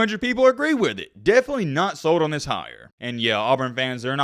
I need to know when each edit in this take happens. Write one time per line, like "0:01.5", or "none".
0:02.8